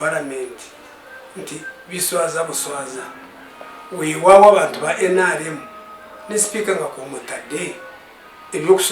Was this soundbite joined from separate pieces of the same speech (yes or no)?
no